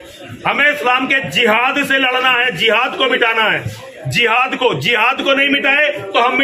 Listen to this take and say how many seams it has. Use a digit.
0